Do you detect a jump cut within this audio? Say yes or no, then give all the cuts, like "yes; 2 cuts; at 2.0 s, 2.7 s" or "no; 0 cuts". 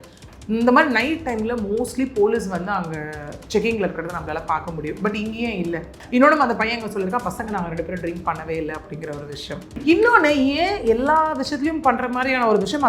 yes; 2 cuts; at 6.0 s, 9.8 s